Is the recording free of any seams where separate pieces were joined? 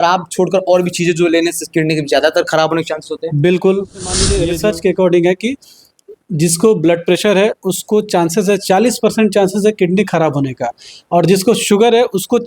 no; 1 cut; at 4.4 s

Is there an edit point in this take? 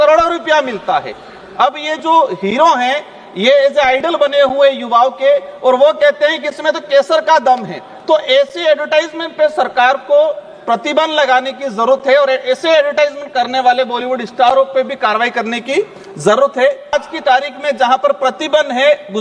yes; 1 cut; at 16.9 s

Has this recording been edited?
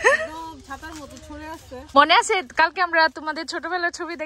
yes; 1 cut; at 2.0 s

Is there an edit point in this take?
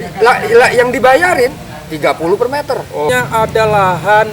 yes; 1 cut; at 3.1 s

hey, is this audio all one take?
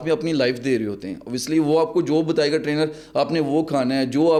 yes; 0 cuts

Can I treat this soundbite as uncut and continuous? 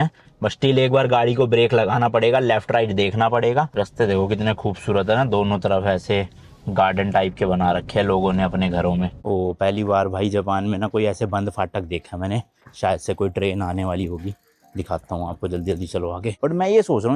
no; 3 cuts; at 3.7 s, 9.2 s, 16.3 s

